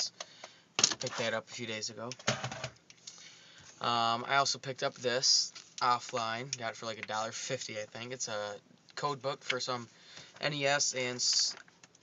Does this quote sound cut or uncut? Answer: cut